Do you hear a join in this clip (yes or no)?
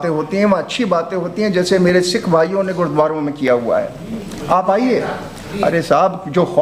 no